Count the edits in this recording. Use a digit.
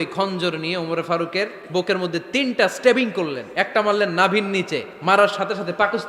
2